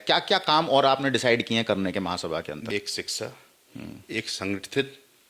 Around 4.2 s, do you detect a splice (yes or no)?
no